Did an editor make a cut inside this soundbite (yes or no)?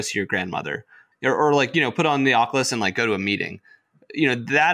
yes